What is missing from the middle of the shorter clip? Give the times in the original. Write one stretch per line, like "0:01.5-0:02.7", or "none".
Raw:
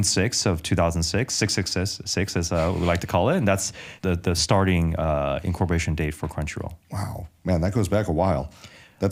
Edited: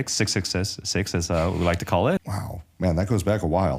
0:03.4-0:06.9